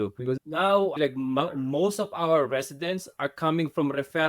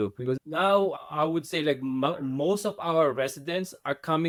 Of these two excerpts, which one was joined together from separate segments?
first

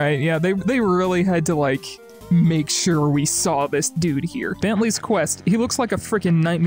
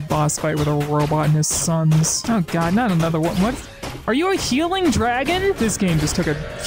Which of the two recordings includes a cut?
first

